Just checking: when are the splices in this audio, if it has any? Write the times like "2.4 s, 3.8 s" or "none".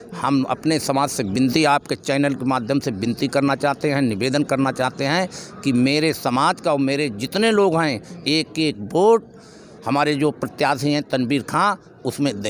none